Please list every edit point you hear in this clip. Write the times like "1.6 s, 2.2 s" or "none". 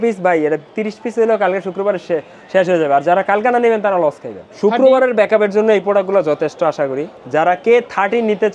4.4 s, 7.1 s